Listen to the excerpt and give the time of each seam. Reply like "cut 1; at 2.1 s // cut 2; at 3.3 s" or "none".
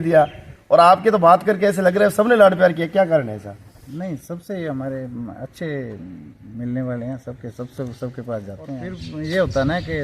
cut 1; at 8.9 s